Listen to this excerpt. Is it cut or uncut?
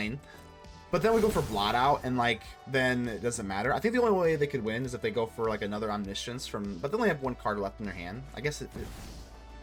uncut